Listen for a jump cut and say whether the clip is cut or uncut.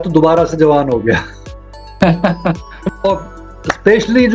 cut